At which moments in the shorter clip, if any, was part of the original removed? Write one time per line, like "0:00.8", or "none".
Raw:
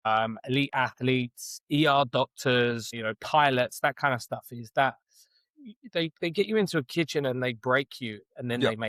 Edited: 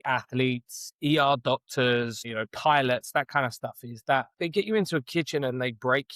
0:04.3